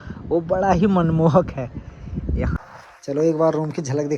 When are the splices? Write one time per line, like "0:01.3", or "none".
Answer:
0:02.6